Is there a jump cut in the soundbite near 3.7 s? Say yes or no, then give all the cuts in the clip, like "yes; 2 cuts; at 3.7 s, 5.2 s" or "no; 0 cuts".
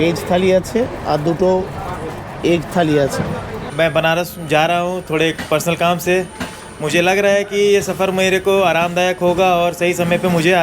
yes; 1 cut; at 3.7 s